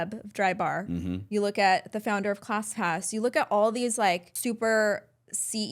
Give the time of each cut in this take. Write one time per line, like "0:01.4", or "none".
0:04.3